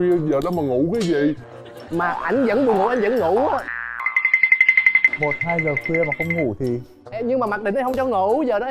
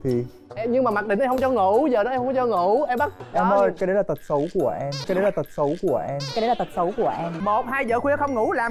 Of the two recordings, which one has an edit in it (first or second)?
second